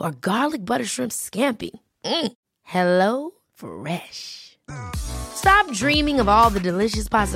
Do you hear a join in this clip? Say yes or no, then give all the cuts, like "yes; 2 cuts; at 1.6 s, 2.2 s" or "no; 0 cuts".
no; 0 cuts